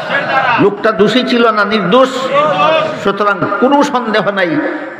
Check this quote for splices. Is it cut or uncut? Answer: uncut